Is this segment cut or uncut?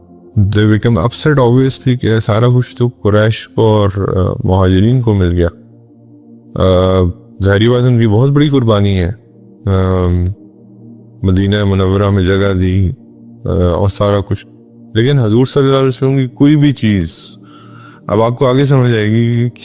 uncut